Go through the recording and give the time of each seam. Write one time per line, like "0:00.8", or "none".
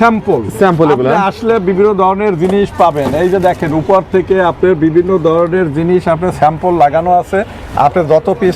none